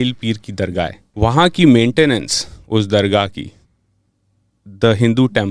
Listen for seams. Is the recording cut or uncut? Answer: cut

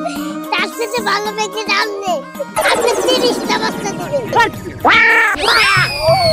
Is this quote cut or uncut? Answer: cut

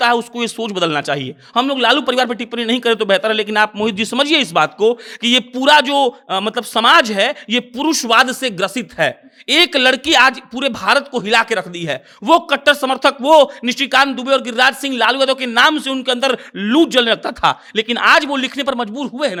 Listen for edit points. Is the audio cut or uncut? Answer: uncut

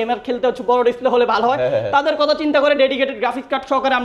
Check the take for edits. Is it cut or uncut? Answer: uncut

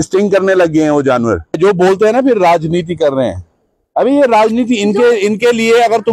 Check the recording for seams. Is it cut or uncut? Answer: cut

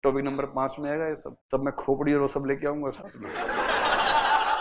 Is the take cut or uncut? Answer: cut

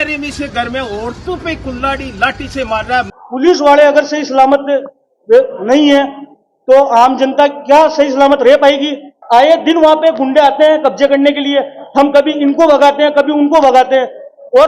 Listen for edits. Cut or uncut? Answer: cut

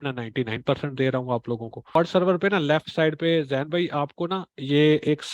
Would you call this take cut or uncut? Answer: cut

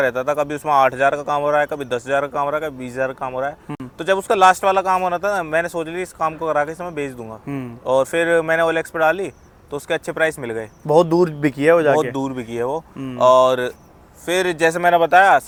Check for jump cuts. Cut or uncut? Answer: uncut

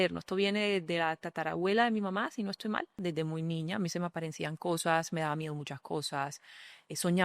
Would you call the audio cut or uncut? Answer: cut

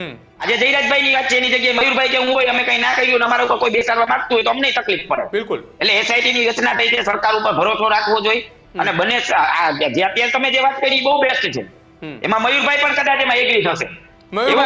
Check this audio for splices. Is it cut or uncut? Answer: uncut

